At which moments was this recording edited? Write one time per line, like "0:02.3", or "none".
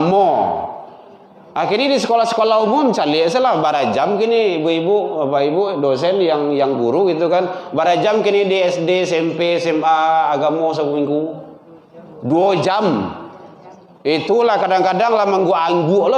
none